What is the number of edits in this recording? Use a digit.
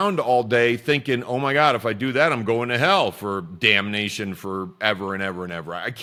0